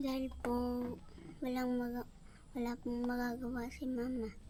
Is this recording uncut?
yes; 0 cuts

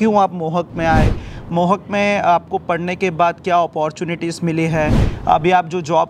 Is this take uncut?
yes; 0 cuts

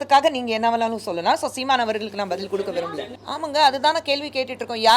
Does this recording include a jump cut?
yes; 1 cut; at 3.1 s

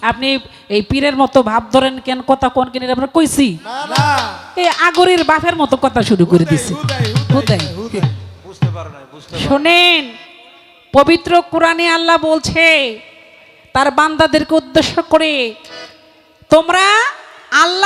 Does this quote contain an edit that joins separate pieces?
no; 0 cuts

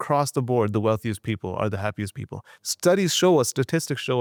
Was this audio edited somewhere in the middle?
no; 0 cuts

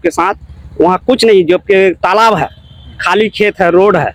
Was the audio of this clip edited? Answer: no; 0 cuts

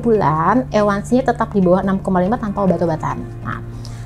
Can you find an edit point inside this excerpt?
no; 0 cuts

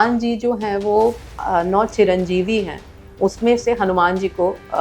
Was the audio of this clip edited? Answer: yes; 1 cut; at 1.4 s

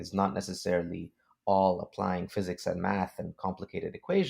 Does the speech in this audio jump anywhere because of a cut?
no; 0 cuts

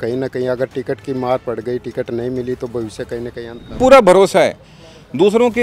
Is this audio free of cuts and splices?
no; 1 cut; at 3.8 s

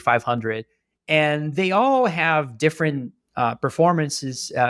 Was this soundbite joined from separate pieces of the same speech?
no; 0 cuts

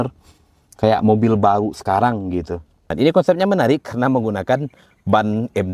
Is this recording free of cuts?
no; 1 cut; at 2.9 s

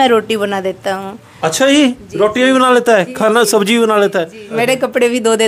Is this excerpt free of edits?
no; 1 cut; at 4.4 s

